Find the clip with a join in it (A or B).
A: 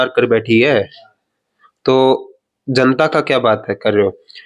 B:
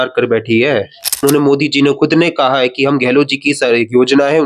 B